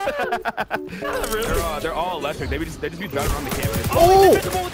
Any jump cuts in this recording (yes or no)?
yes